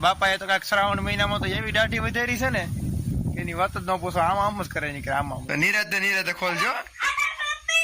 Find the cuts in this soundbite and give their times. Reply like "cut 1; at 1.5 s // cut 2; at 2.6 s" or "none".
cut 1; at 5.4 s